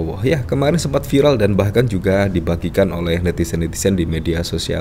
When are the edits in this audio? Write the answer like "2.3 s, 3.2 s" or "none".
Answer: none